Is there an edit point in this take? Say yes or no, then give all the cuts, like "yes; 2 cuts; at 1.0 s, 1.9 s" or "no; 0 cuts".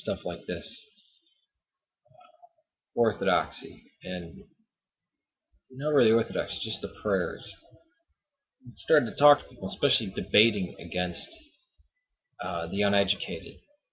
no; 0 cuts